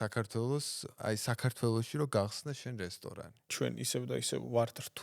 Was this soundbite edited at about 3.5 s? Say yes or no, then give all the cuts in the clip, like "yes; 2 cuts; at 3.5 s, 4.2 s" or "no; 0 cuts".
yes; 1 cut; at 3.5 s